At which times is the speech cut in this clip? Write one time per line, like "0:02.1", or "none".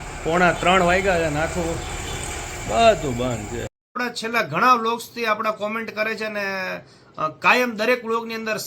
0:04.0